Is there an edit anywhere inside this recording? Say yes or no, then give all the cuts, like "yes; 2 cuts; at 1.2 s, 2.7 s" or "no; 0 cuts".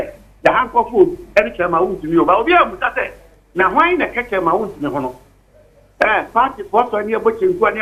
no; 0 cuts